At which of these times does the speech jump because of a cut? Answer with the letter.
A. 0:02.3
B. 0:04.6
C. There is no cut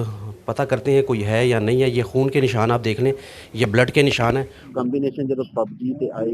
B